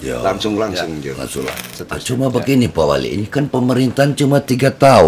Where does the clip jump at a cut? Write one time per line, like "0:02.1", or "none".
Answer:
0:01.6